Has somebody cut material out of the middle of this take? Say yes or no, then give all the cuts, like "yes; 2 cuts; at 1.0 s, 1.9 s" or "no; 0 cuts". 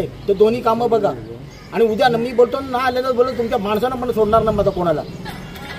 no; 0 cuts